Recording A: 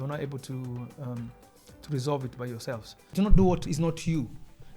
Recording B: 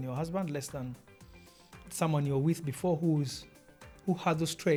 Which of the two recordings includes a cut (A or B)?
A